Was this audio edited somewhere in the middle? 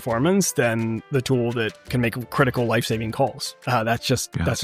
yes; 1 cut; at 1.8 s

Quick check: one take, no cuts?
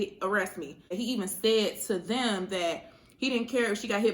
no; 1 cut; at 0.9 s

